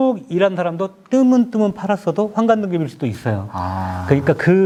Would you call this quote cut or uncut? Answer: uncut